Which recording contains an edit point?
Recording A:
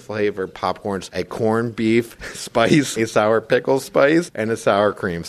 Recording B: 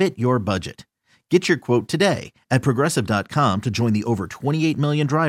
A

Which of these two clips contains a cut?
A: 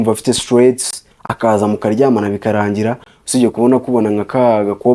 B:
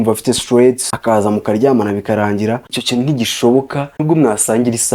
B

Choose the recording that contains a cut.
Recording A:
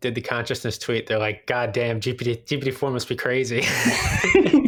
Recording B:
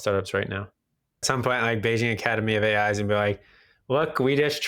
B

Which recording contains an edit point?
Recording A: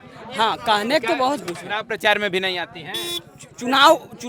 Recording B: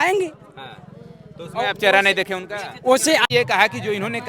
B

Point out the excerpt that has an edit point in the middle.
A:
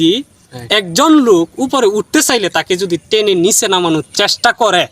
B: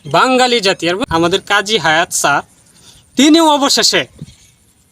B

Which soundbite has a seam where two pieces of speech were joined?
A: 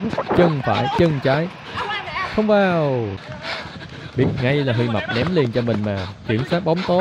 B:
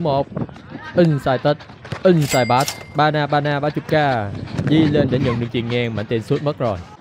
A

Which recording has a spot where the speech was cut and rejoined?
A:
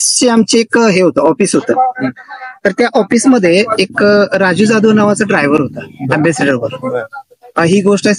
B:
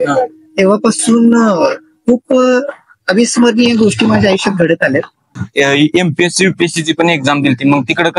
B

